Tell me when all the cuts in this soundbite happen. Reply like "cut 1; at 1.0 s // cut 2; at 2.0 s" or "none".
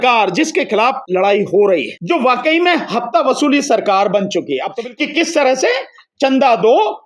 cut 1; at 1.0 s // cut 2; at 1.9 s // cut 3; at 4.8 s